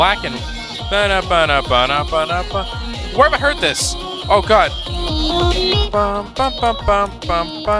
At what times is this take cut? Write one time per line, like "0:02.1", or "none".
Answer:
none

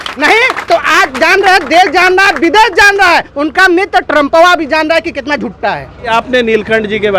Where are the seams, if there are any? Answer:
0:06.1

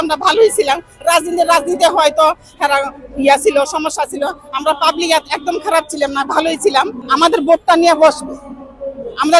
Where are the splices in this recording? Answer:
0:07.0

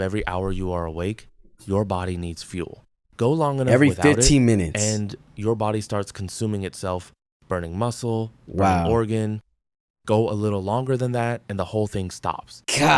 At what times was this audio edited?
none

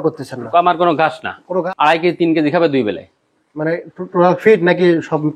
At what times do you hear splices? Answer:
0:01.6

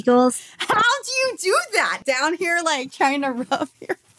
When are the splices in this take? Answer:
0:02.0

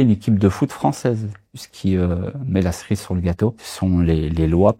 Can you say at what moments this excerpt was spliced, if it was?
0:01.7
0:03.7

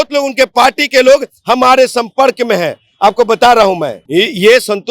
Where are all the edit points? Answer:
0:03.9

